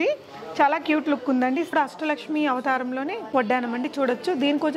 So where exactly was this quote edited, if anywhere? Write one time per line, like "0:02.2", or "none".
0:01.7